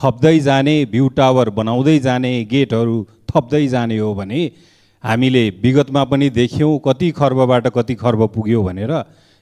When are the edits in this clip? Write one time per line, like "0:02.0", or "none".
none